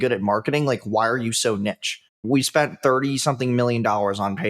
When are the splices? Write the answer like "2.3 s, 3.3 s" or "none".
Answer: 2.3 s